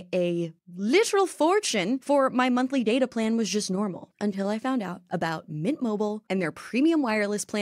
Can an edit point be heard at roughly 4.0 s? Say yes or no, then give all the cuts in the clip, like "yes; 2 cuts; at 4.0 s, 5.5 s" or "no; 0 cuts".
yes; 2 cuts; at 2.0 s, 4.0 s